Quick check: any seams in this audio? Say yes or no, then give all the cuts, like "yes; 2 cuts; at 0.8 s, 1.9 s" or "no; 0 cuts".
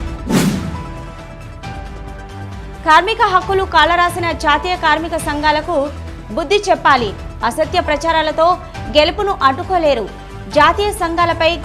yes; 1 cut; at 2.4 s